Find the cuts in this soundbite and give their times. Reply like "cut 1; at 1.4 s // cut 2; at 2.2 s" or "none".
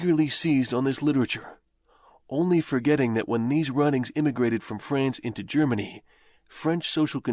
cut 1; at 3.7 s